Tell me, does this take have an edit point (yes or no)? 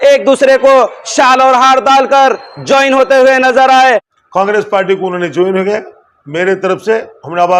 yes